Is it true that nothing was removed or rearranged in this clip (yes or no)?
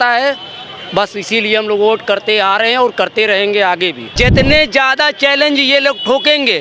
no